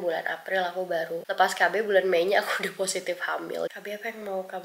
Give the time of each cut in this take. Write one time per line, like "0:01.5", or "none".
0:01.2
0:03.7